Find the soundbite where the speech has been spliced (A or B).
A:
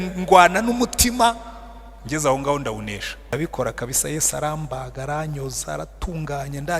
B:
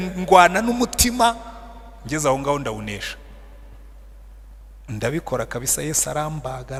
A